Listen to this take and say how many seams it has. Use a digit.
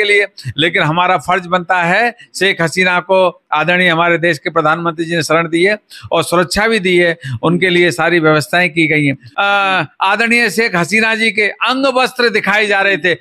1